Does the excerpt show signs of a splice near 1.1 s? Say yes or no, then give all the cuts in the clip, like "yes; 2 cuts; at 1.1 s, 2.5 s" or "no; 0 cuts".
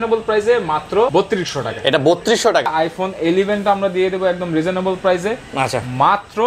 yes; 2 cuts; at 1.1 s, 2.7 s